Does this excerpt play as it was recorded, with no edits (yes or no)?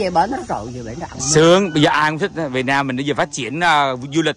yes